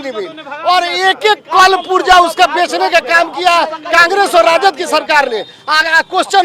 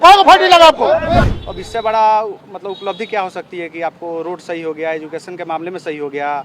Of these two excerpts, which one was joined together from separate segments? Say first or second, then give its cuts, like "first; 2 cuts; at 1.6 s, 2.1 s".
second; 1 cut; at 1.4 s